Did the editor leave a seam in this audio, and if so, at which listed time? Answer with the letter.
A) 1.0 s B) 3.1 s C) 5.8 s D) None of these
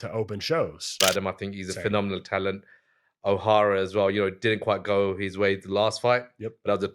A